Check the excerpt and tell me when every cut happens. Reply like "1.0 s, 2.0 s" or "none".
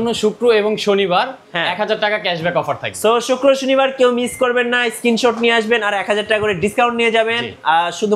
none